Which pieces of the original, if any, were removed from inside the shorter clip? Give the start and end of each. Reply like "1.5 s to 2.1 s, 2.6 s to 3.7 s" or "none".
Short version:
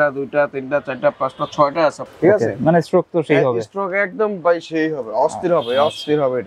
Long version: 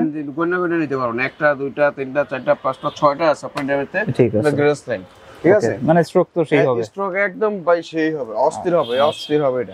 3.5 s to 5.3 s